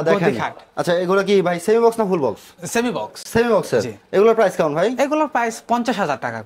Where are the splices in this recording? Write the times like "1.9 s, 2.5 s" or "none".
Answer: none